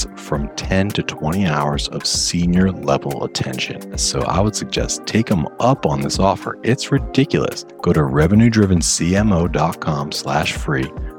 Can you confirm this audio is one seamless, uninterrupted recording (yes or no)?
no